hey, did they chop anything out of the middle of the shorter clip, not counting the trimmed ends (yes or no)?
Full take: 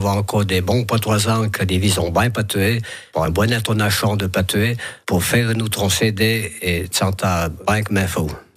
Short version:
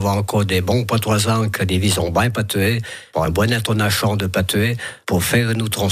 no